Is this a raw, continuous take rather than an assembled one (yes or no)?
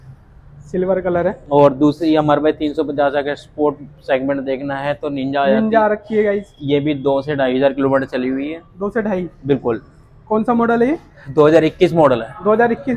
yes